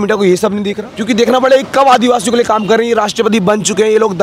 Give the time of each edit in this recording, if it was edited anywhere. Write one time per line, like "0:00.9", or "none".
0:01.0

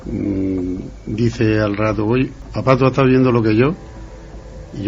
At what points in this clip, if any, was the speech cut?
0:02.5

